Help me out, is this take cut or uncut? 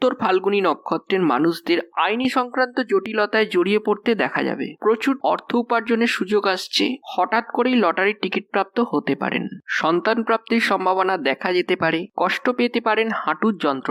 uncut